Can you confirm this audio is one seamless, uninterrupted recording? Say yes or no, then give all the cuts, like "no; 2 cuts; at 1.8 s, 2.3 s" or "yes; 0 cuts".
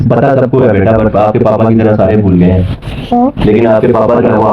yes; 0 cuts